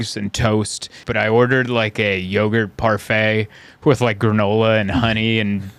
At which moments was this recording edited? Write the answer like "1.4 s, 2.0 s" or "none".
1.0 s